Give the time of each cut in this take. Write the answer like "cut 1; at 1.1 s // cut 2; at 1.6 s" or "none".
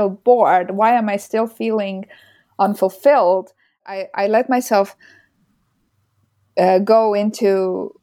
cut 1; at 3.8 s